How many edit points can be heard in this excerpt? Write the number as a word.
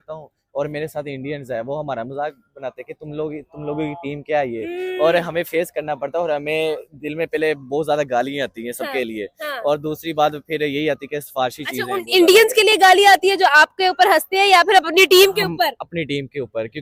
zero